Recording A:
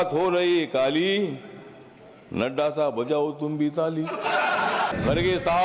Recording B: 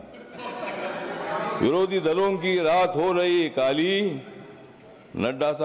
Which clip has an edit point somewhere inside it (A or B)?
A